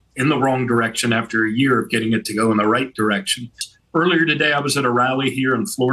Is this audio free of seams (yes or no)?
no